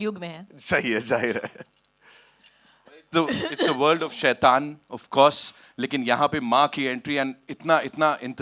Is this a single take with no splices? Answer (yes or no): yes